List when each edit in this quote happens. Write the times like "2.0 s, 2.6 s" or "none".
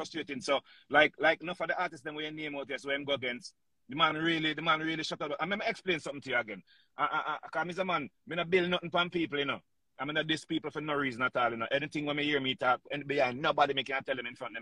none